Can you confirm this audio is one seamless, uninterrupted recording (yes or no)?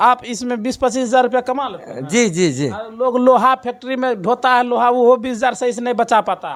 yes